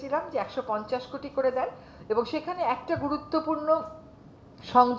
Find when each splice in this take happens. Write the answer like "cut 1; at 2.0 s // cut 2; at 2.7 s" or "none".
none